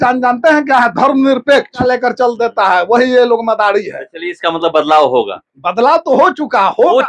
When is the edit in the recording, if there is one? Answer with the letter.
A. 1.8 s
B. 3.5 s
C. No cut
A